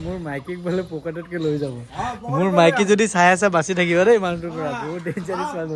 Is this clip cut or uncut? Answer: uncut